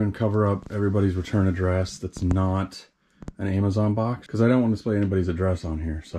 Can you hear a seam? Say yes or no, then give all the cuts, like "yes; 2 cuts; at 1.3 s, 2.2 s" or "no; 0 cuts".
yes; 1 cut; at 4.2 s